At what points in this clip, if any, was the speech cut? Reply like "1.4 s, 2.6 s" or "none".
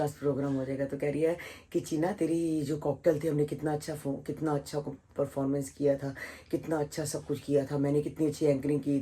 none